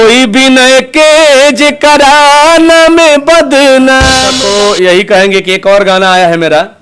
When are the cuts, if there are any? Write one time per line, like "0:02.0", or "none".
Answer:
0:04.3